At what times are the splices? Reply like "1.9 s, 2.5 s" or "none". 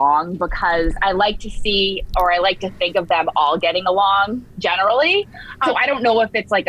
5.6 s